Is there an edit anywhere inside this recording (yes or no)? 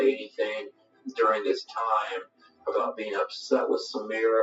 yes